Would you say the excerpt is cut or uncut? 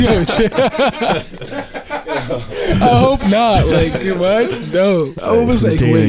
cut